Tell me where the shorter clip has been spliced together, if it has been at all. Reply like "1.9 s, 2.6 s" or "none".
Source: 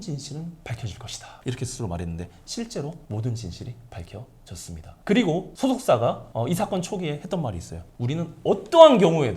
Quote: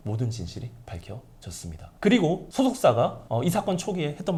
none